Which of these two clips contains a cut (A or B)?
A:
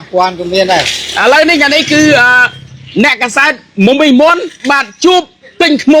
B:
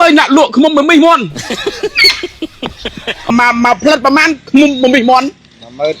B